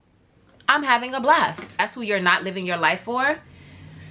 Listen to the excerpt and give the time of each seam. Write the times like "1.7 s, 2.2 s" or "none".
1.7 s